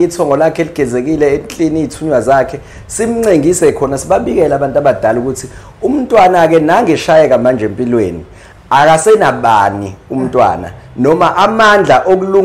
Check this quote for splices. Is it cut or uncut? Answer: uncut